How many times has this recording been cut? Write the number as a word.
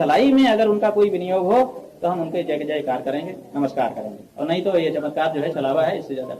zero